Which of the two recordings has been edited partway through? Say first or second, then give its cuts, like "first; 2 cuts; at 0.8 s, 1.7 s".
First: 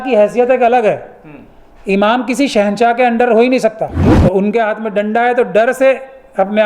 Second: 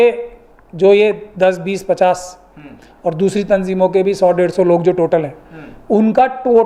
first; 1 cut; at 3.9 s